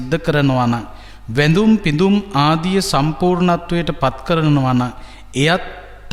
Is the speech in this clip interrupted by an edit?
no; 0 cuts

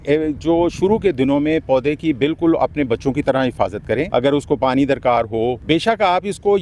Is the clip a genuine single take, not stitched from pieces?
no; 2 cuts; at 4.1 s, 5.6 s

